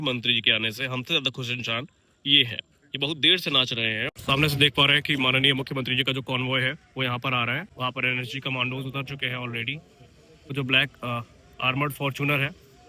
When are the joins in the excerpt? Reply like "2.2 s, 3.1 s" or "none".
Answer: 4.1 s, 7.7 s, 10.5 s